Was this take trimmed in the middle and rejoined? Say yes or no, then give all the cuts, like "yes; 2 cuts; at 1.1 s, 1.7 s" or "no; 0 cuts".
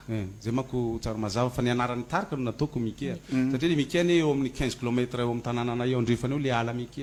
no; 0 cuts